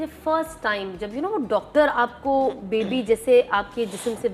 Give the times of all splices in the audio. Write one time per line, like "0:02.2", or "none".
none